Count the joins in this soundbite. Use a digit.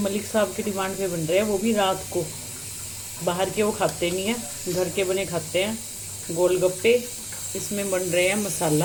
0